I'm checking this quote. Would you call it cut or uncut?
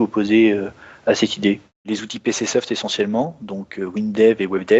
cut